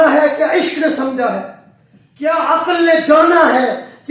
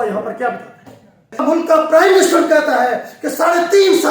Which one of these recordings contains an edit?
second; 1 cut; at 1.4 s

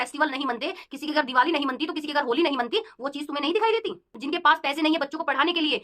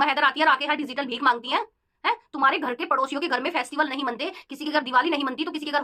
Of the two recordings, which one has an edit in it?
first; 1 cut; at 4.1 s

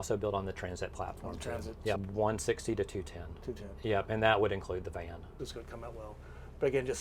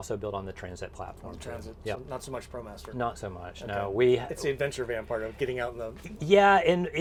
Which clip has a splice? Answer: first; 2 cuts; at 2.0 s, 5.3 s

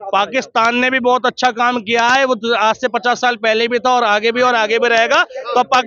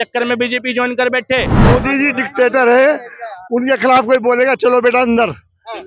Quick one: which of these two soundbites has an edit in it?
second; 1 cut; at 1.6 s

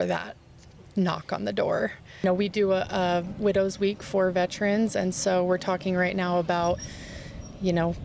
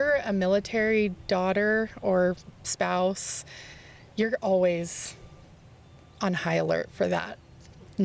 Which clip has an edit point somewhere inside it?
first; 1 cut; at 2.2 s

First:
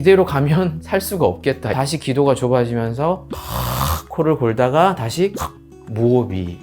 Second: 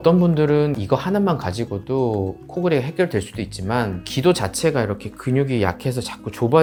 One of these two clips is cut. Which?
first; 1 cut; at 1.7 s

